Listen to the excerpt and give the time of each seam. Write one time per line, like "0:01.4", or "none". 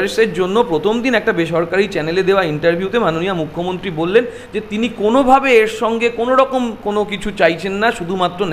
none